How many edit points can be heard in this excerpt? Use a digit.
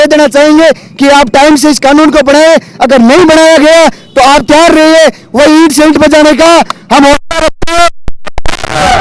0